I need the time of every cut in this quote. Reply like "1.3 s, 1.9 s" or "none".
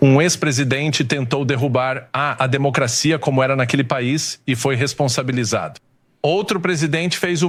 none